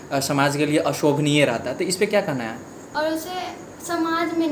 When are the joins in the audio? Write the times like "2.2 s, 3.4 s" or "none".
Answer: 2.9 s